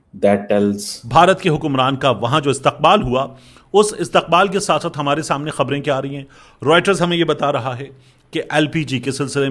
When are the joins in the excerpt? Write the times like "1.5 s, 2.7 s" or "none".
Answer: 0.9 s